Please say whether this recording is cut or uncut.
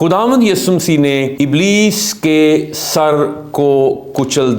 cut